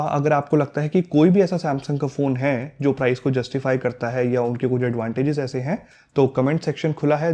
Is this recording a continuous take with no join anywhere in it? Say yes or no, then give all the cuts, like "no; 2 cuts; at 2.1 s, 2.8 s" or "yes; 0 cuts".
yes; 0 cuts